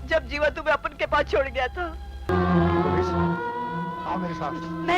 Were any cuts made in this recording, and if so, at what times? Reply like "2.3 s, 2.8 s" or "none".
2.3 s